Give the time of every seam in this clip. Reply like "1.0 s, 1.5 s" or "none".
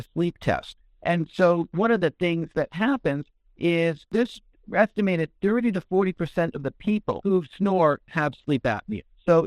1.7 s, 4.1 s, 7.2 s

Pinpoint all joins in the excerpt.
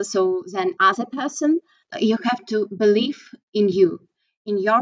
1.9 s

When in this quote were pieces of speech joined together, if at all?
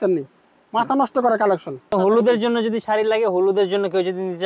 1.9 s

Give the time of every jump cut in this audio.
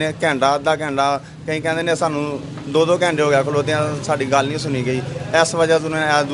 none

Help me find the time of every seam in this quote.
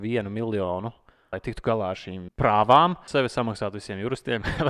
1.3 s, 2.2 s, 3.1 s

